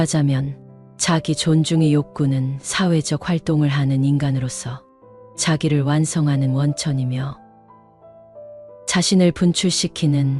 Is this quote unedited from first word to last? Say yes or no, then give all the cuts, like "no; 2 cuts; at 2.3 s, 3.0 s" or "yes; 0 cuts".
no; 2 cuts; at 7.4 s, 8.9 s